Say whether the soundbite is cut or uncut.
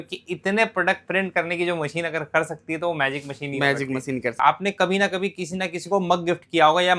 cut